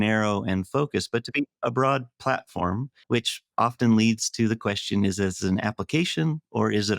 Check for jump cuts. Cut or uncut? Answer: uncut